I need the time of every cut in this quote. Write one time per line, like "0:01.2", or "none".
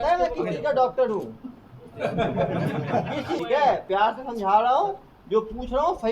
0:03.4